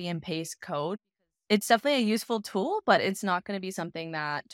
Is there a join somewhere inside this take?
yes; 1 cut; at 1.0 s

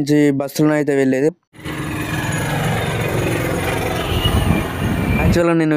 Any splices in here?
yes; 1 cut; at 1.4 s

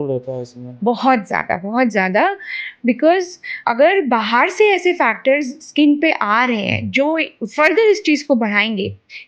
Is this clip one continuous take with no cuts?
no; 1 cut; at 3.5 s

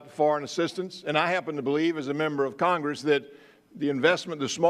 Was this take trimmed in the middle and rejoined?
yes; 1 cut; at 1.5 s

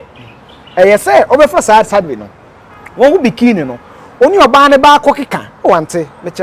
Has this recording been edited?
no; 0 cuts

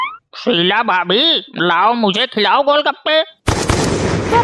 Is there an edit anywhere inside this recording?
no; 0 cuts

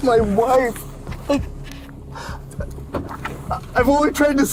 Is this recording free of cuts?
yes; 0 cuts

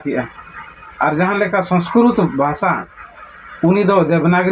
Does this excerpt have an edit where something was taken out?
no; 0 cuts

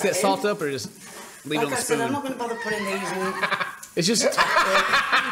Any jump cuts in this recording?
no; 0 cuts

